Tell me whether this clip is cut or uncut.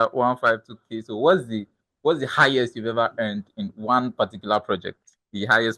uncut